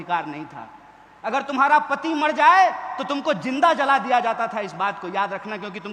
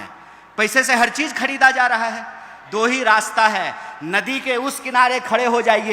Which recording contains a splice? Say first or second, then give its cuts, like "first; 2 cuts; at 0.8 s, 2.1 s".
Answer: second; 1 cut; at 2.5 s